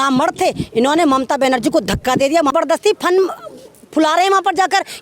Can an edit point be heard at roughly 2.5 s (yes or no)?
yes